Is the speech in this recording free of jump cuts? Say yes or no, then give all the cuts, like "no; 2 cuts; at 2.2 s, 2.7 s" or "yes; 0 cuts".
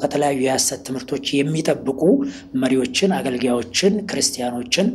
yes; 0 cuts